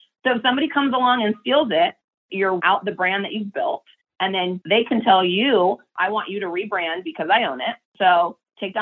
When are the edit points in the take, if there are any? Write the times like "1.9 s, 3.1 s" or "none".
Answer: 2.3 s, 4.6 s, 5.9 s, 7.8 s